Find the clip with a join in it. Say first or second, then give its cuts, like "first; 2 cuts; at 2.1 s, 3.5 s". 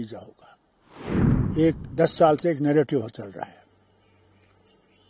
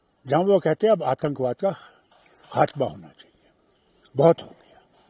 first; 1 cut; at 1.3 s